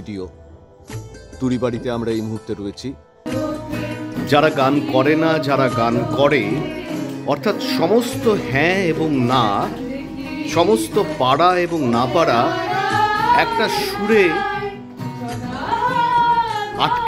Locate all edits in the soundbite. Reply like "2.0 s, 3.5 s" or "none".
3.3 s